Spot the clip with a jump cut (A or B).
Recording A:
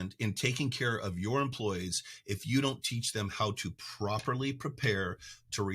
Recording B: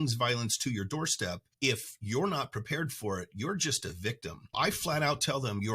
B